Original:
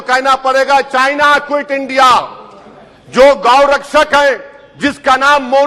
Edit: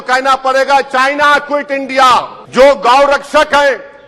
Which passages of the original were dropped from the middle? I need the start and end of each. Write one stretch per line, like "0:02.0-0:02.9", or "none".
0:02.4-0:03.0